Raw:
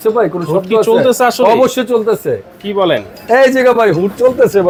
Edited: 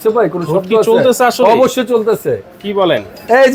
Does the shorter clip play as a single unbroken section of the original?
yes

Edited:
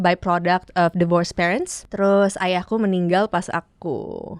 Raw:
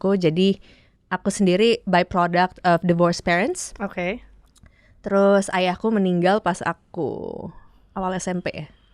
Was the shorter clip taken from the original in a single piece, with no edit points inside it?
no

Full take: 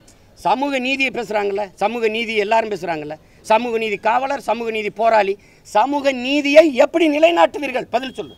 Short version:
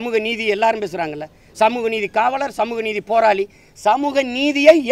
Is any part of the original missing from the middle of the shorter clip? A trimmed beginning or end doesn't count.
no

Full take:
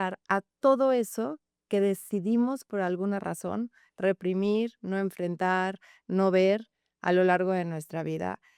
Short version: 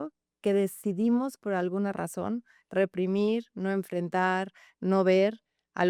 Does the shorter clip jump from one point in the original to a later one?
no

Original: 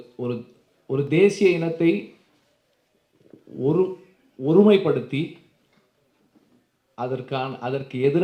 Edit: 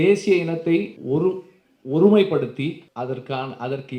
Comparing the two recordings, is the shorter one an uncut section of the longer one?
no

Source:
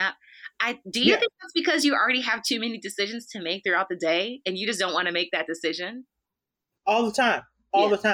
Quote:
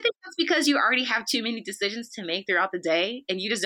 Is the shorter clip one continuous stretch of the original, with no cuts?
yes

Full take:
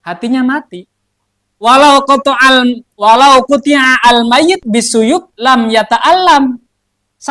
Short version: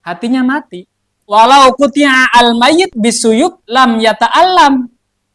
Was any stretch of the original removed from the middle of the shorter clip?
yes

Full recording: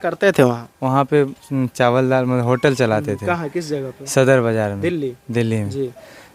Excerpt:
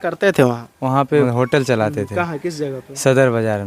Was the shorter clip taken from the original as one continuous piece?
no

